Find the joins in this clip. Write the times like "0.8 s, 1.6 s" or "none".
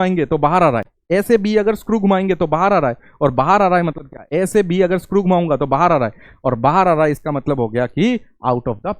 0.9 s